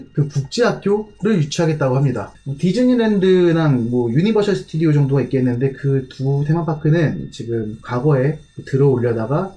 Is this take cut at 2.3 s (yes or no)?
yes